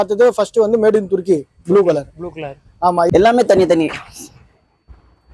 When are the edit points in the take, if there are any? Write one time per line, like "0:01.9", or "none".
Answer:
0:03.1